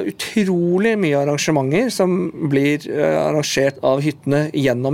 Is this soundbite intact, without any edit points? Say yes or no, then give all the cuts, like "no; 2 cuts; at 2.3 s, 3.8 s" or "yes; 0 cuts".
no; 1 cut; at 3.8 s